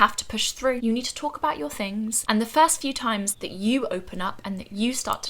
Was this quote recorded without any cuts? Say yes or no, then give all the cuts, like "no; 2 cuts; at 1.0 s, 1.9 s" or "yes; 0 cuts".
no; 3 cuts; at 0.8 s, 2.2 s, 3.4 s